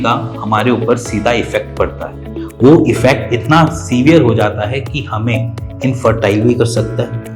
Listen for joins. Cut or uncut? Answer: uncut